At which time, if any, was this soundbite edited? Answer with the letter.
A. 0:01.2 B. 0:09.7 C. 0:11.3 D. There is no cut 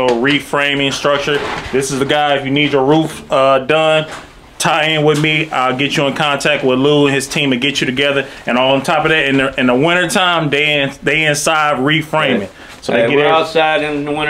D